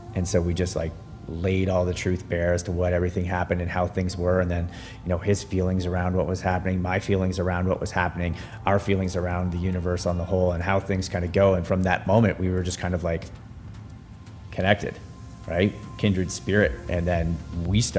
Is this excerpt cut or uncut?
uncut